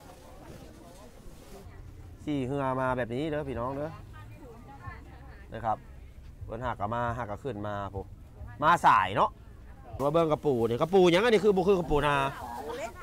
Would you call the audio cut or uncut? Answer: cut